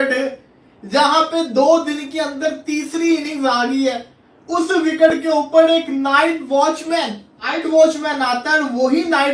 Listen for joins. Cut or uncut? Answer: cut